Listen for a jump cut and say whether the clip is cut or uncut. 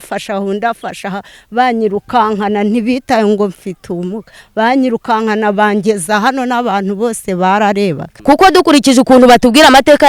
cut